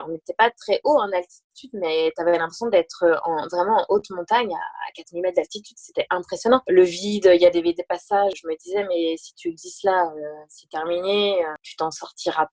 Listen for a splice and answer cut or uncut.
cut